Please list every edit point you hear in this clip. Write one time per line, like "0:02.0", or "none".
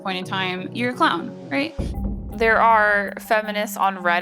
0:01.9